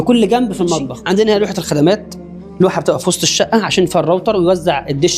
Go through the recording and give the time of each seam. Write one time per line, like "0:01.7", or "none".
0:00.9